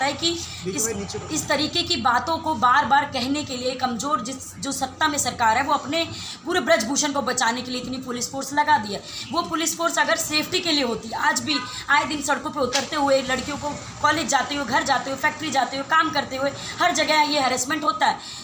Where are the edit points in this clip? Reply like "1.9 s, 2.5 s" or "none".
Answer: none